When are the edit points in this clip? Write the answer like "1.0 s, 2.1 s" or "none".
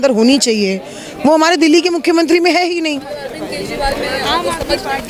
none

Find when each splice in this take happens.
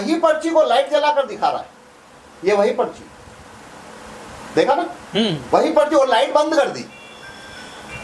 none

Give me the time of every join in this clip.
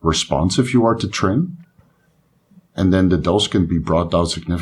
none

